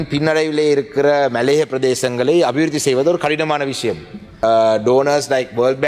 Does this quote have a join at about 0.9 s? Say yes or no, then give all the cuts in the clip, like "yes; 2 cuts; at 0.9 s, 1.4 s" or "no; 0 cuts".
no; 1 cut; at 4.3 s